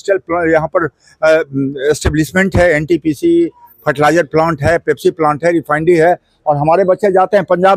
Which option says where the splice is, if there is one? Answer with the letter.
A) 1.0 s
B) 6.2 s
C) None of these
C